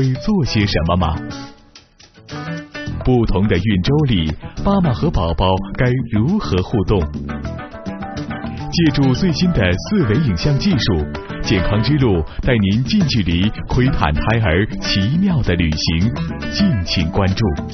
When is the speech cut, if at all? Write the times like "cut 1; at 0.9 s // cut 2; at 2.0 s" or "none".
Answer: none